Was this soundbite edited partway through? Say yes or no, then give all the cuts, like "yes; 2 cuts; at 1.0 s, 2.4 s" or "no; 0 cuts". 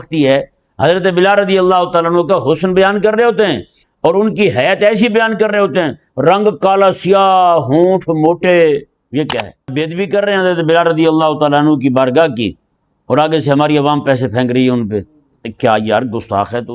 yes; 1 cut; at 9.7 s